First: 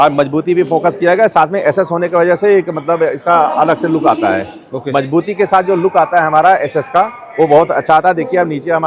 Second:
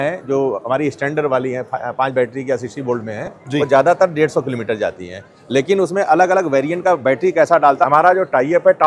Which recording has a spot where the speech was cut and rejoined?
second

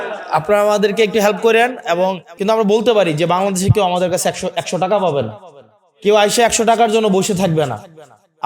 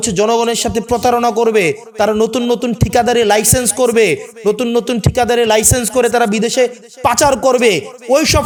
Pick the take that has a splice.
first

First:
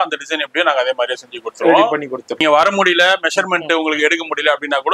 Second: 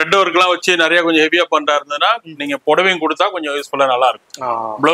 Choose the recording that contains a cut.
first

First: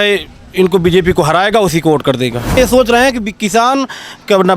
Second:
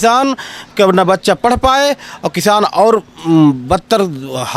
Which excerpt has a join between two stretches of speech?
first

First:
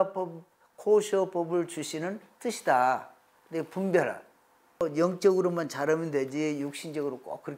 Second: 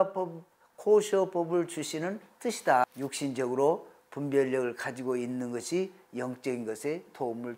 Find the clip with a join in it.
second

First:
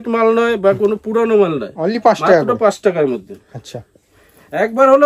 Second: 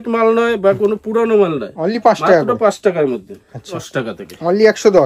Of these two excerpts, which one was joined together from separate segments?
second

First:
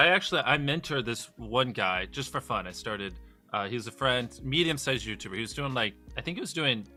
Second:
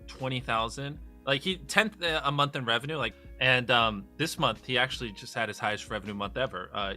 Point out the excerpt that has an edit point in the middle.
second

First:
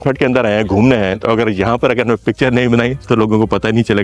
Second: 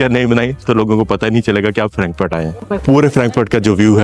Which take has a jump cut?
second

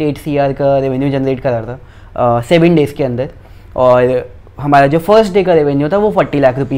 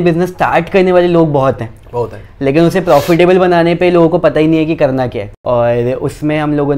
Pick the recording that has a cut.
second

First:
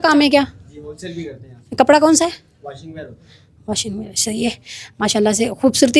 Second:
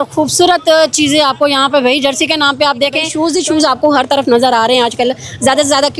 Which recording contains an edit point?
second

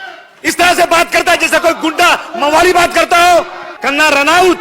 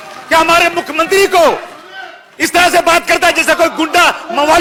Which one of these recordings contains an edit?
first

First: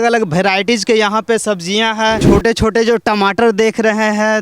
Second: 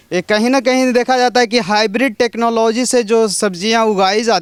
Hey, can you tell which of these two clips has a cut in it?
first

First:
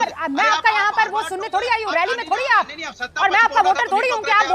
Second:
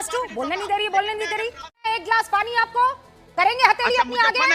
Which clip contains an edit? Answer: second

